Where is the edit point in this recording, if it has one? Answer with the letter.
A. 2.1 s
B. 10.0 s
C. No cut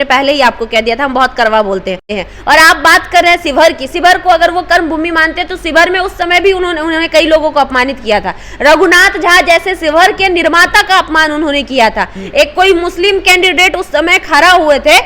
A